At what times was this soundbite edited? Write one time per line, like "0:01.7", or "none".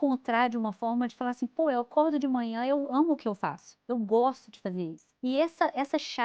0:05.0